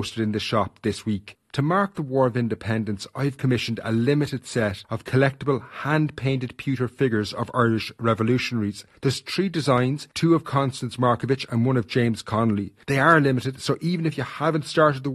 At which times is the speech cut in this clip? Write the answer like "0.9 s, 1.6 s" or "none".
none